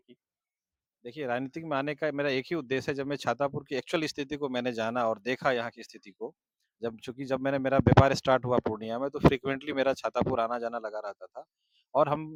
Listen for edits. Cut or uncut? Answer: uncut